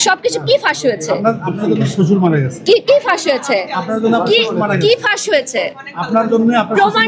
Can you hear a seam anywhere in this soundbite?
no; 0 cuts

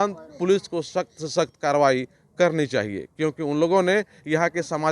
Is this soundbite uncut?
yes; 0 cuts

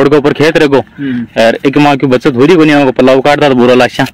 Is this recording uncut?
yes; 0 cuts

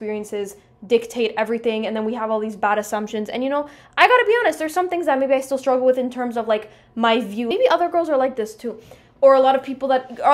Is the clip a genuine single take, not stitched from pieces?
yes; 0 cuts

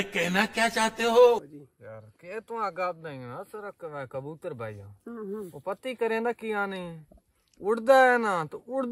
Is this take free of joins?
no; 1 cut; at 1.4 s

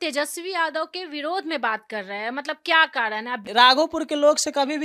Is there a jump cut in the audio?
yes; 1 cut; at 3.5 s

